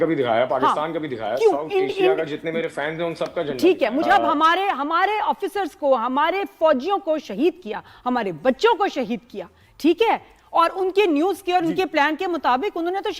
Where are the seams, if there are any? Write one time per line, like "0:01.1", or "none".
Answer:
0:04.0